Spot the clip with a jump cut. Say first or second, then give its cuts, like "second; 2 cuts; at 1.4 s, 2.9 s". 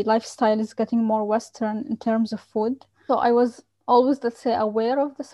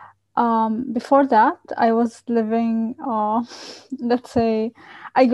first; 1 cut; at 3.0 s